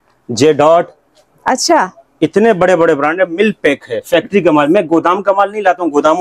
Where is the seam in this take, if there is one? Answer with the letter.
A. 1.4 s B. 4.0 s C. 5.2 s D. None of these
D